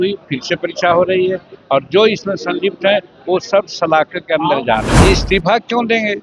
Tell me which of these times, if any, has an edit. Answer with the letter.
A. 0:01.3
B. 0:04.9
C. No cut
B